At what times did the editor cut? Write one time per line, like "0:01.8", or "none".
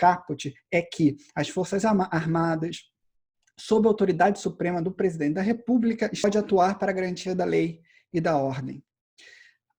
0:06.2